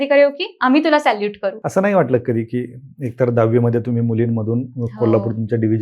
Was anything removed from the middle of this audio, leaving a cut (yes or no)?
yes